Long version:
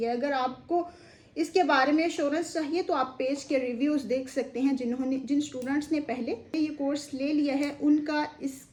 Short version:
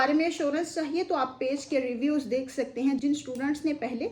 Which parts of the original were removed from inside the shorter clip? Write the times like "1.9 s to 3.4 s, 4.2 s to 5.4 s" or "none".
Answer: 4.8 s to 5.3 s